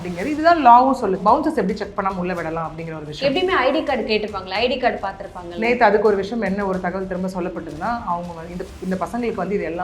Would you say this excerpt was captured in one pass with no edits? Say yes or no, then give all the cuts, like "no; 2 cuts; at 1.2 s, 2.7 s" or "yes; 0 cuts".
no; 1 cut; at 1.2 s